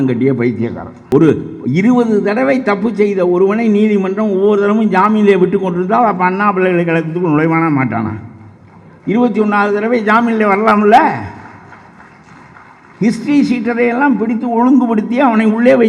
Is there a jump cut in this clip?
yes; 1 cut; at 1.0 s

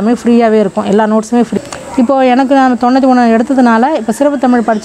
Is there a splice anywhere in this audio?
yes; 1 cut; at 1.5 s

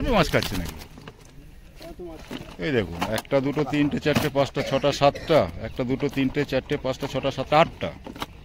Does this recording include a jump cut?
no; 0 cuts

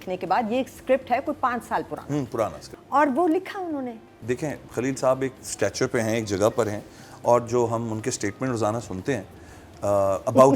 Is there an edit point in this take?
yes; 2 cuts; at 2.7 s, 4.1 s

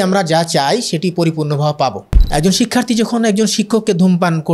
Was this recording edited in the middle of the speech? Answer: yes; 1 cut; at 2.1 s

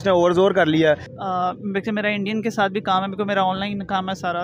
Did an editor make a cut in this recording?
yes; 1 cut; at 1.1 s

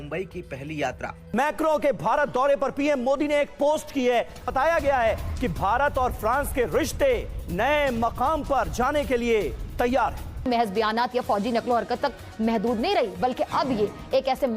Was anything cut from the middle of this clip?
yes; 2 cuts; at 1.2 s, 4.4 s

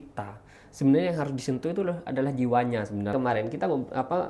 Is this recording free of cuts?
no; 1 cut; at 3.1 s

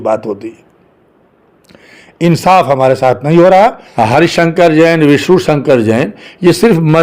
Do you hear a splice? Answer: yes; 1 cut; at 3.8 s

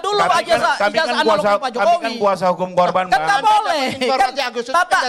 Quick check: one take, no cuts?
yes; 0 cuts

